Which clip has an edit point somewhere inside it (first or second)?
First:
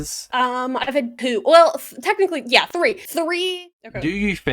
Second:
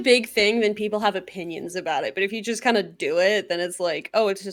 first